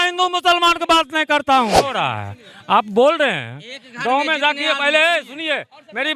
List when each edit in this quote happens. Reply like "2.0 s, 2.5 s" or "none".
1.9 s